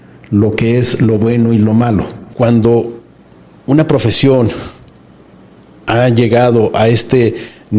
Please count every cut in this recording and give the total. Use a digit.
1